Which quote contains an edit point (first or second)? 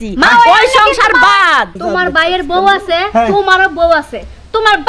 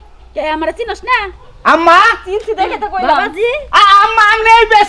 first